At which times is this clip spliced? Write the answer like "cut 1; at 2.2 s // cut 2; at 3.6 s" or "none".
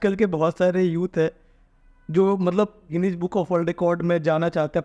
none